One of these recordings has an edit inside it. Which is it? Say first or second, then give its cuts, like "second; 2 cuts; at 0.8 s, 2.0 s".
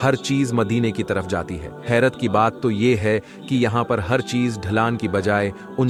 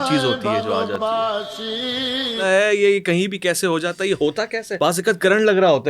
second; 2 cuts; at 2.4 s, 4.7 s